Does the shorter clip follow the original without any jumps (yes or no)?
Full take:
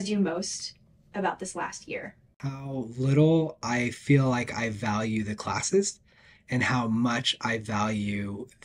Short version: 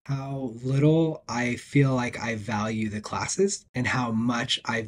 no